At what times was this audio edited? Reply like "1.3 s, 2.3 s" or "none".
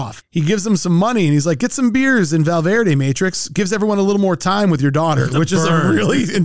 none